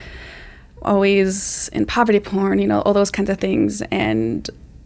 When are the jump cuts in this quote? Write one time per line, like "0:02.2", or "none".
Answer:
none